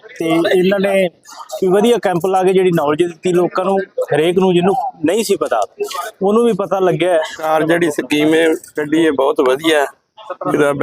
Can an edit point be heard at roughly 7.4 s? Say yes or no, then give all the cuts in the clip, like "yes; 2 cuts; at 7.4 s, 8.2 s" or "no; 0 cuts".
yes; 1 cut; at 7.4 s